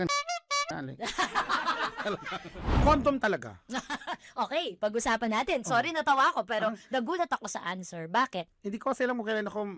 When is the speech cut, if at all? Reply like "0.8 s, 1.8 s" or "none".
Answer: 2.6 s